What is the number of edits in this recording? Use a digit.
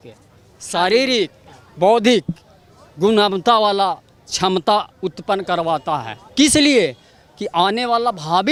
0